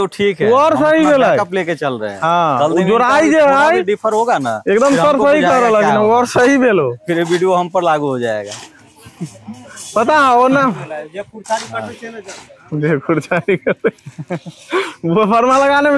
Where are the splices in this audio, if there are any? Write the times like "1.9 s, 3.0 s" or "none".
none